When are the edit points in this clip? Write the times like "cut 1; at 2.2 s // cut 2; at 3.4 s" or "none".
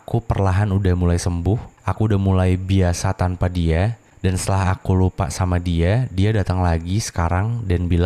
cut 1; at 1.8 s // cut 2; at 4.0 s